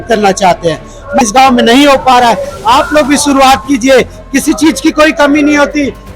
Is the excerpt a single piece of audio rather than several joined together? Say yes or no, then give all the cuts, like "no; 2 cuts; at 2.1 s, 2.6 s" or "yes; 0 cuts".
no; 1 cut; at 1.2 s